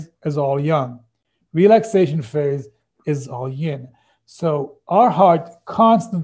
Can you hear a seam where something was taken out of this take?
no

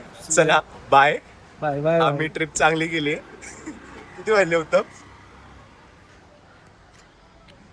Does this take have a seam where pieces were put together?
no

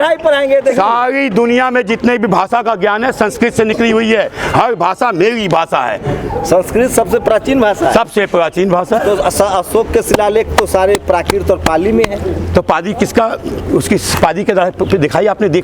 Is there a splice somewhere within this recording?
no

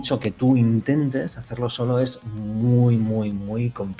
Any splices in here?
no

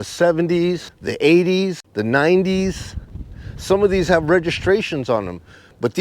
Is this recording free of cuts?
no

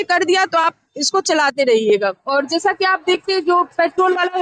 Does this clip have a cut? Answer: yes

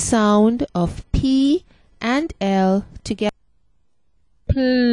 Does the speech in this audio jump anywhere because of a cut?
yes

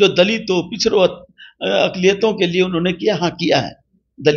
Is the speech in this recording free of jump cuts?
yes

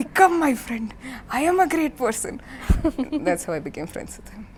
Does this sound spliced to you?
no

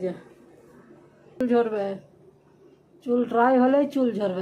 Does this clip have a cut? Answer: yes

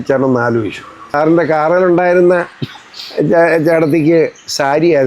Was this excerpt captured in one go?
no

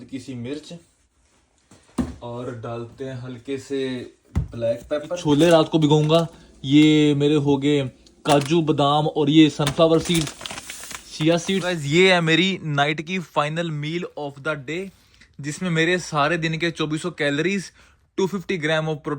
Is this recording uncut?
no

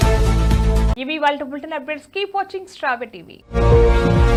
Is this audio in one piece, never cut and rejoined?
yes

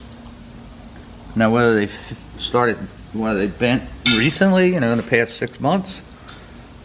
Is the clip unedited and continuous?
yes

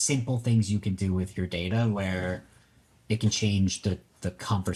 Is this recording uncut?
yes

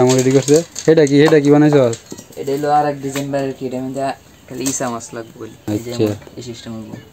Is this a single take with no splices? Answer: no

